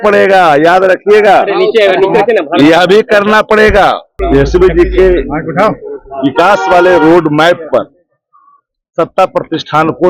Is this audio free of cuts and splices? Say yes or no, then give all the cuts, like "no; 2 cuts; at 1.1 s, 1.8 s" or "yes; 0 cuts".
no; 1 cut; at 4.2 s